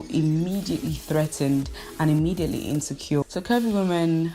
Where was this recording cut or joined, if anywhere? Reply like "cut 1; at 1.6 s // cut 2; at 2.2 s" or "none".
cut 1; at 3.2 s